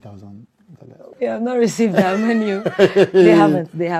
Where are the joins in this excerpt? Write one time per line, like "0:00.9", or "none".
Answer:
none